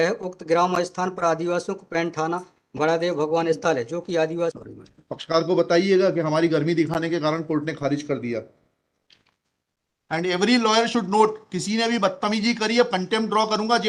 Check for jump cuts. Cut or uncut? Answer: cut